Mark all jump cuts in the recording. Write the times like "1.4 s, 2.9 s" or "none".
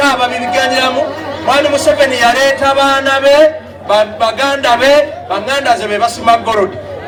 none

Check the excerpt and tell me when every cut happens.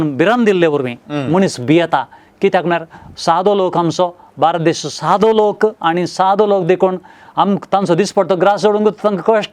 none

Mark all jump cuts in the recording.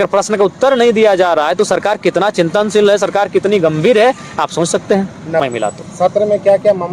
5.4 s

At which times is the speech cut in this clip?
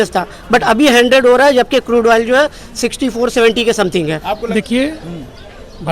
4.4 s

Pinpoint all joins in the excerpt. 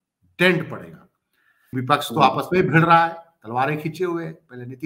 1.8 s

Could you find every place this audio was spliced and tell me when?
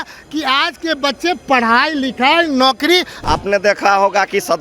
3.1 s

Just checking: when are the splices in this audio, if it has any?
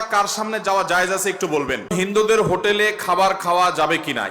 1.9 s

